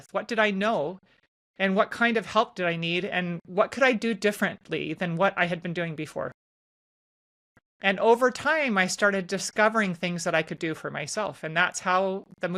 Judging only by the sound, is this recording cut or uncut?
uncut